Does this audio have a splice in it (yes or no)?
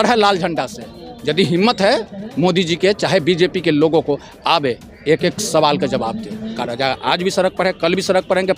yes